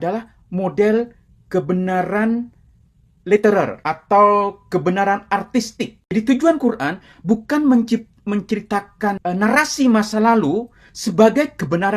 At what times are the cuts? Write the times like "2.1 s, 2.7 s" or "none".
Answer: 3.8 s, 6.1 s, 9.2 s